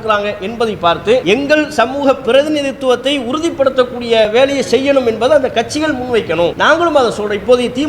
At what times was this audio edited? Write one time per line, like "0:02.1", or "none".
0:01.2
0:04.3
0:06.6